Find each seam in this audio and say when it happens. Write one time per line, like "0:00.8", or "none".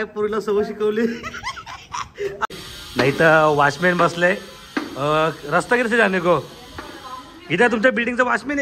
0:02.5